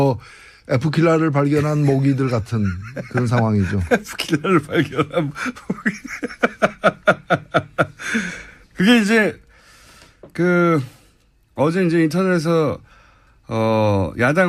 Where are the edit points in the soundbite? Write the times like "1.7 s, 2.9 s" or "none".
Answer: none